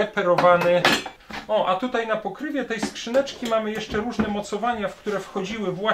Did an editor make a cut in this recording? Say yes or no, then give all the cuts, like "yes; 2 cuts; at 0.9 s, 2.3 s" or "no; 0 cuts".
yes; 1 cut; at 1.1 s